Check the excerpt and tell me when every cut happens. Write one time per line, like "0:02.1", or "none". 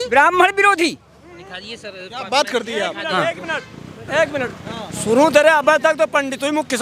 none